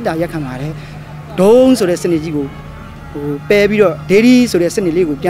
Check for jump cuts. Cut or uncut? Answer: uncut